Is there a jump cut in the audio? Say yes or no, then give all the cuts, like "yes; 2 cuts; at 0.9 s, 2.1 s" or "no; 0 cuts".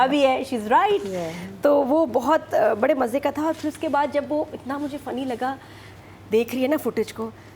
no; 0 cuts